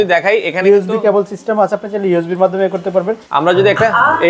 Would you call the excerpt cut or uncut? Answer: cut